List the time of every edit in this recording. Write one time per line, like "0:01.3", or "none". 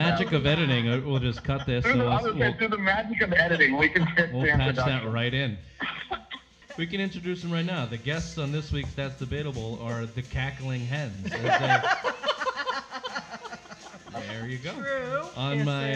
0:06.6